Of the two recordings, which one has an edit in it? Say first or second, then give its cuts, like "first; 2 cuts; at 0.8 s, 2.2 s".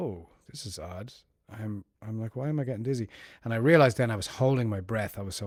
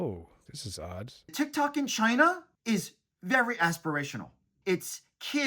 second; 3 cuts; at 1.2 s, 2.5 s, 4.6 s